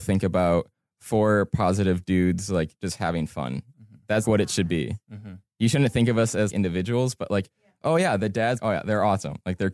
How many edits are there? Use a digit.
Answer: 3